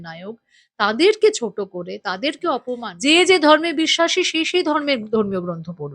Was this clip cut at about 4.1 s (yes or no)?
no